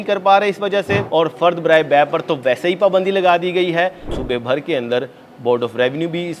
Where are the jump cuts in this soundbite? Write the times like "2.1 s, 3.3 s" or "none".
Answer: 1.0 s, 4.1 s

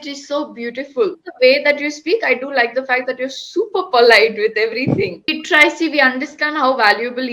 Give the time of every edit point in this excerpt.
1.2 s, 5.3 s

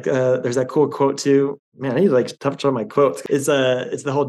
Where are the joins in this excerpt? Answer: 1.7 s, 3.2 s

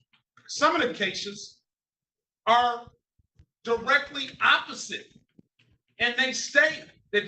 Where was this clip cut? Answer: 5.0 s

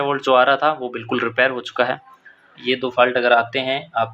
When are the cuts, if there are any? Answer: 2.5 s

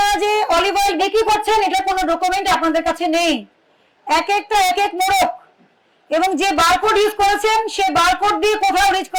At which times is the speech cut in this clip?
none

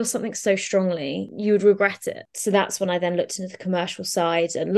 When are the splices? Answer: 1.3 s, 2.3 s

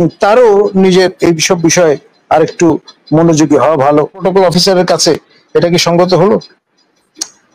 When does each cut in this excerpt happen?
4.2 s

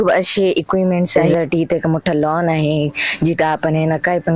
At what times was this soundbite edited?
1.2 s

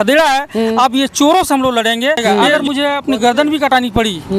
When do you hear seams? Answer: 2.4 s

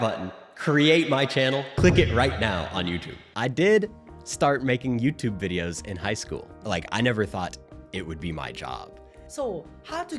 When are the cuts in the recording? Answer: 3.2 s, 6.5 s, 9.3 s

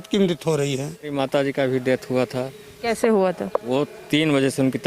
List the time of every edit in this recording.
1.1 s

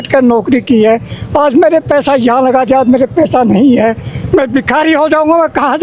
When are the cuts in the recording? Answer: none

